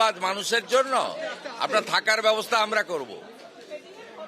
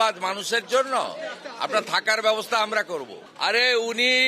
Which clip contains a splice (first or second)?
second